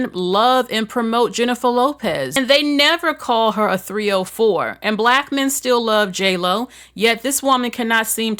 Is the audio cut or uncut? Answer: cut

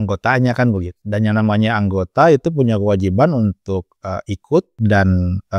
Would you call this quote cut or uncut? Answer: cut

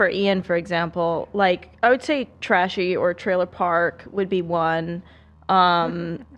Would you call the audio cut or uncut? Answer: uncut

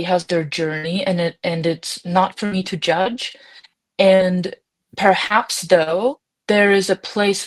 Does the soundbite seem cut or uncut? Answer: cut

